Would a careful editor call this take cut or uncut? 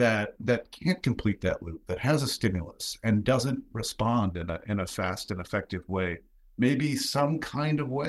uncut